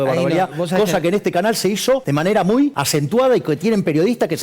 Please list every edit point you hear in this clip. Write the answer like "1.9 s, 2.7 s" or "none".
2.0 s, 2.8 s